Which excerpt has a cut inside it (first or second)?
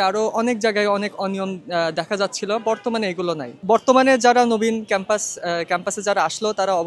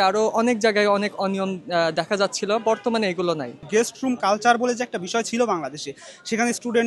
second